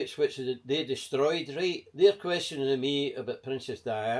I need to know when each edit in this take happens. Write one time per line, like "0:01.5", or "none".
none